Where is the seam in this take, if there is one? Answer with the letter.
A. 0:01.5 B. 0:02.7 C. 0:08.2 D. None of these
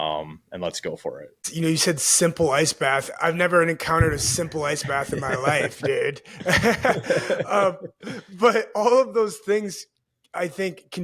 A